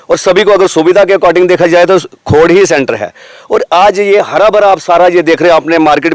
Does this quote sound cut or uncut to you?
uncut